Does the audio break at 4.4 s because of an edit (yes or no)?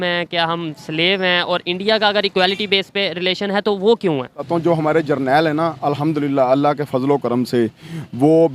yes